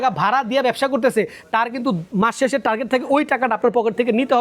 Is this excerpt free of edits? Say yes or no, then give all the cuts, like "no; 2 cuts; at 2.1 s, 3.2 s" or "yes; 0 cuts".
no; 1 cut; at 2.1 s